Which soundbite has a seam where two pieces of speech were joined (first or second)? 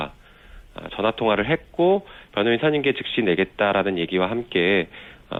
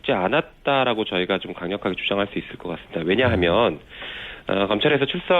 second